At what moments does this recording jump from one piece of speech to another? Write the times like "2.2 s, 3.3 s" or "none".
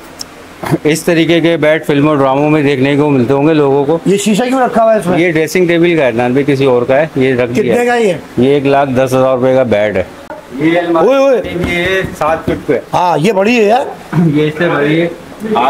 10.4 s